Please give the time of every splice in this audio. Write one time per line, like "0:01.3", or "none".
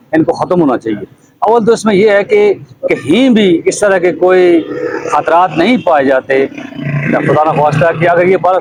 none